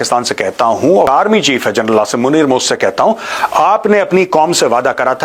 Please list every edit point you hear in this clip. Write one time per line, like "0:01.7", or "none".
0:01.1
0:03.3